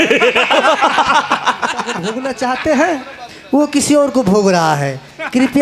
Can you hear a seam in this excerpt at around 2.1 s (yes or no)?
yes